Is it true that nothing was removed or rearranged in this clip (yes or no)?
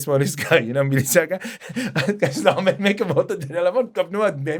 yes